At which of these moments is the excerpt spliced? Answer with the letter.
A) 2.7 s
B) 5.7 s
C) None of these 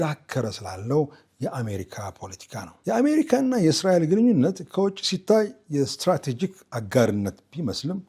A